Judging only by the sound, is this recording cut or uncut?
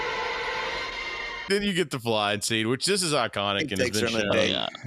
cut